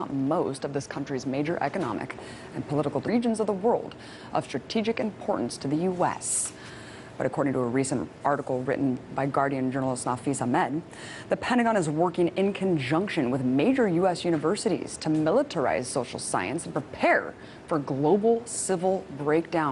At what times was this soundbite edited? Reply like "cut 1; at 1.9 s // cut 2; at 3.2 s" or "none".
none

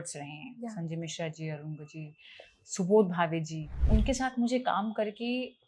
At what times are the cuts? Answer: cut 1; at 3.9 s

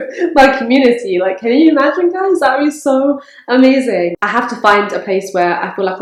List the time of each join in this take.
none

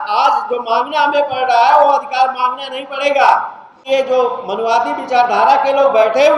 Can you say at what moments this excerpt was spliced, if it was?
cut 1; at 3.8 s

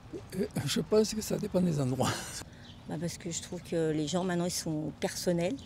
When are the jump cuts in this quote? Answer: cut 1; at 2.3 s

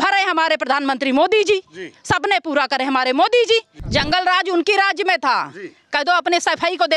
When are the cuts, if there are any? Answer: cut 1; at 3.8 s

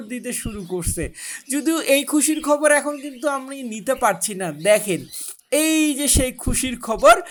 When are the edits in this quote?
none

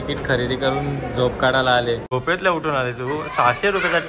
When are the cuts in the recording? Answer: cut 1; at 2.1 s

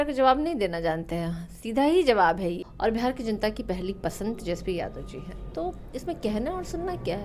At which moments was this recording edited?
cut 1; at 2.7 s

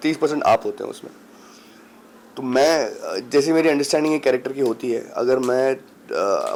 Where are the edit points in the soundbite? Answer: none

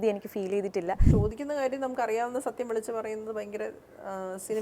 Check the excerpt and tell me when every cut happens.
cut 1; at 1.0 s

